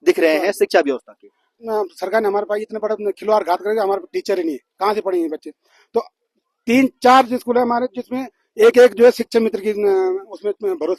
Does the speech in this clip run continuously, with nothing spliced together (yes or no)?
no